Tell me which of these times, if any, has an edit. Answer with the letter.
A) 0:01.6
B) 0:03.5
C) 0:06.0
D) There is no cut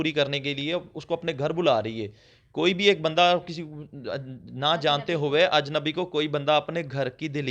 D